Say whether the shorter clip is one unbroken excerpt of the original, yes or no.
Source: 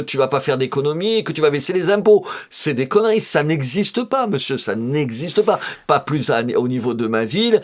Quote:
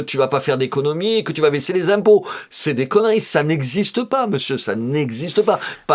yes